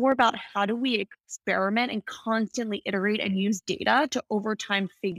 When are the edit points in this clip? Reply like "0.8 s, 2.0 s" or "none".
none